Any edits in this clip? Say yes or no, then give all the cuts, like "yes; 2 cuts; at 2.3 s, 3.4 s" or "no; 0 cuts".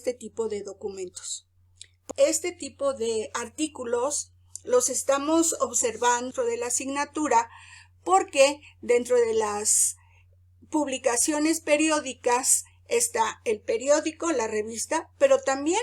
yes; 2 cuts; at 2.0 s, 6.3 s